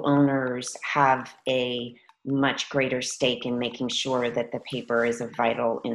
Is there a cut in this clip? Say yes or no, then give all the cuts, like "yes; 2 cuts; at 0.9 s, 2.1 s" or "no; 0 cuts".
no; 0 cuts